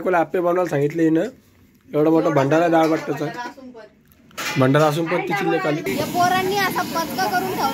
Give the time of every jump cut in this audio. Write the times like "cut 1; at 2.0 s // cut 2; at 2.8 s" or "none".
cut 1; at 5.9 s